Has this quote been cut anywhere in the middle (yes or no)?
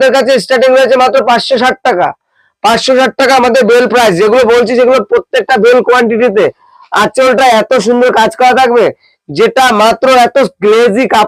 no